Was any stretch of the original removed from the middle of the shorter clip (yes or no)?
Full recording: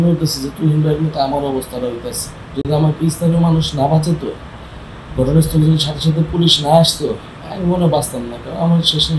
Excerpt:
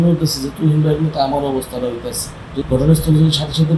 yes